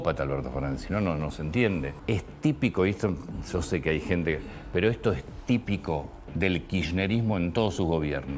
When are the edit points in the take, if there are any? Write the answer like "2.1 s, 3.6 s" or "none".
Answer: 1.9 s